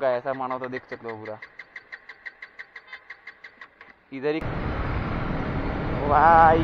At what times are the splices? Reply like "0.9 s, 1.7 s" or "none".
4.4 s